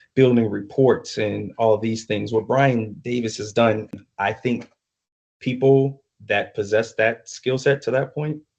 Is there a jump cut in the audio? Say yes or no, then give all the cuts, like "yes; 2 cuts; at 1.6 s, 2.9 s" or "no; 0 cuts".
yes; 1 cut; at 3.9 s